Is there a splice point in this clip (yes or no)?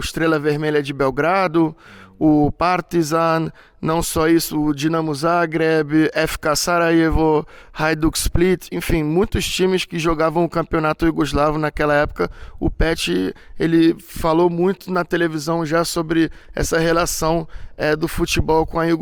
no